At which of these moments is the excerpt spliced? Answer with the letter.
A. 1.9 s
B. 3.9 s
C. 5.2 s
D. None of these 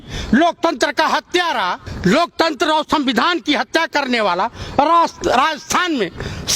A